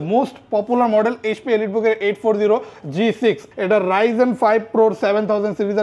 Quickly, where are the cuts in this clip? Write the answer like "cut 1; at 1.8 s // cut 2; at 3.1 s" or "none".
cut 1; at 3.5 s